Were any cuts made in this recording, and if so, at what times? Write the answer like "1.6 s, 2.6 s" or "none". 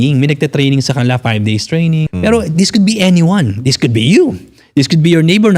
2.1 s